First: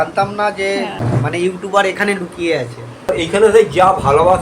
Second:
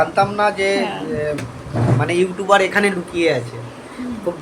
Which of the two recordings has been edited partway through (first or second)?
first